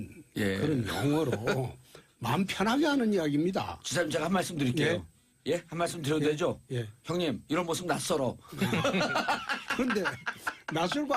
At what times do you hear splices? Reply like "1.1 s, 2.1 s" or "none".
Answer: 2.9 s